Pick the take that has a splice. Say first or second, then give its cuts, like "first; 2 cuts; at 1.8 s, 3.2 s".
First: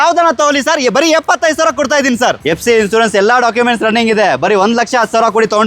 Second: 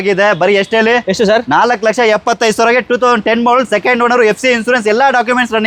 first; 1 cut; at 2.4 s